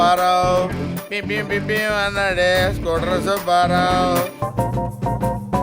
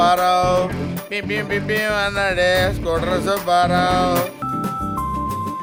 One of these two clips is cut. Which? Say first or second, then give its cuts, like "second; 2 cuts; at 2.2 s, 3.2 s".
first; 1 cut; at 4.4 s